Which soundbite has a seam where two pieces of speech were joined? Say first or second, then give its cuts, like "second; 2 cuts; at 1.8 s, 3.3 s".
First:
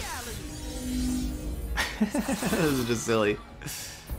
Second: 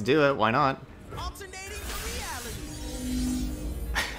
second; 1 cut; at 0.9 s